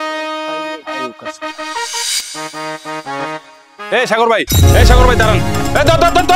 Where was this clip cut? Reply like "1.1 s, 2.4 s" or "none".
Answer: 2.0 s